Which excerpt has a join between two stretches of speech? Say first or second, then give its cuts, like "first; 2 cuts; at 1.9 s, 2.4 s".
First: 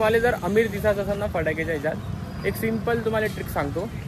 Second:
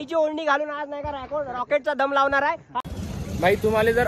second; 1 cut; at 2.8 s